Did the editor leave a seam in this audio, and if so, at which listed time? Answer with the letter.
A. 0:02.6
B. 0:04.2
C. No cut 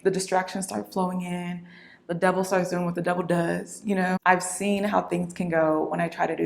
B